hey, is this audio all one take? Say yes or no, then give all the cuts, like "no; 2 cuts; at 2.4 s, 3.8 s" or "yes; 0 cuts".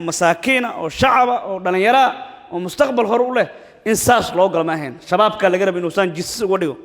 yes; 0 cuts